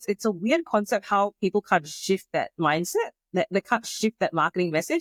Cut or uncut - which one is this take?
uncut